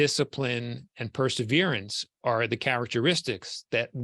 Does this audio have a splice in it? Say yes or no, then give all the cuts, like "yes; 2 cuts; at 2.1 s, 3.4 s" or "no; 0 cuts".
no; 0 cuts